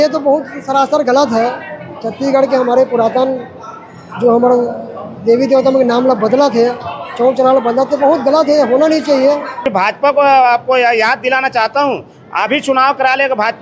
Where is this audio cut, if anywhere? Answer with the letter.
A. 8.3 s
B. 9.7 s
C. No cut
B